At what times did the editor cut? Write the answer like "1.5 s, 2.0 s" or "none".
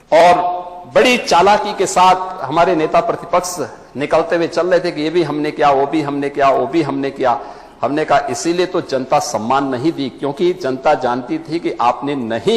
none